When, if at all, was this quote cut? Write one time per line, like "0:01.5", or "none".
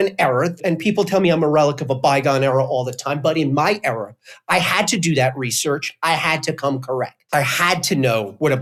none